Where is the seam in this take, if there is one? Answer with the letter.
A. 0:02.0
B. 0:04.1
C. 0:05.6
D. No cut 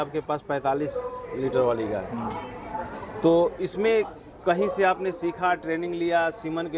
D